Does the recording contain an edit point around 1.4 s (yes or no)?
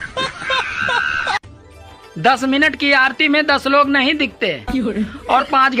yes